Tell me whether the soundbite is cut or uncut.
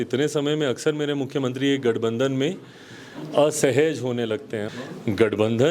cut